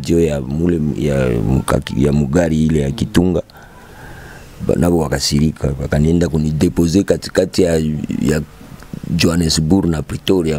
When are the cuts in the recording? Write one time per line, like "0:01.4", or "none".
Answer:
none